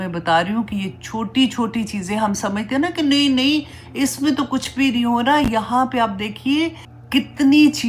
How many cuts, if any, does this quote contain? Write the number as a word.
one